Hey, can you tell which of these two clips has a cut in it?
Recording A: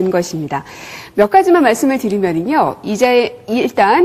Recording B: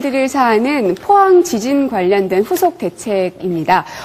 A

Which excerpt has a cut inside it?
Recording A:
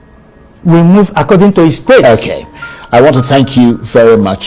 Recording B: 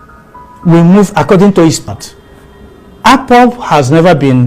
B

